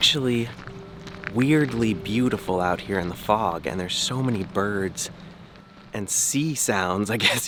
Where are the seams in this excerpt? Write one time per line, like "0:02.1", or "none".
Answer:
none